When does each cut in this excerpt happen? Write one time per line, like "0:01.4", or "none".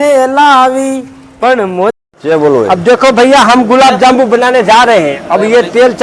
0:02.0